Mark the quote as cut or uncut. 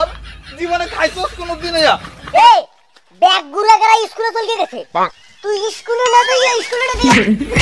cut